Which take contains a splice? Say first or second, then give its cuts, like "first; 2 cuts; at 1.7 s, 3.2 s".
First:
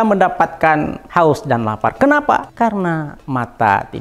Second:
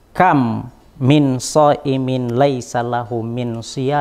first; 2 cuts; at 1.0 s, 2.5 s